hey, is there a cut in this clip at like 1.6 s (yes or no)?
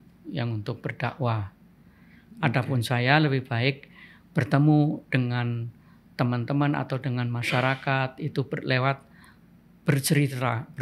no